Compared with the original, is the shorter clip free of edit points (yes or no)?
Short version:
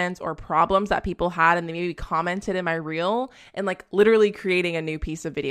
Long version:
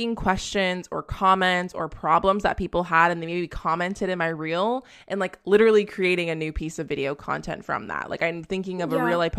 yes